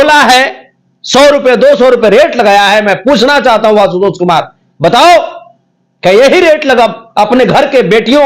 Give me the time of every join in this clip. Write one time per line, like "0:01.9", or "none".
none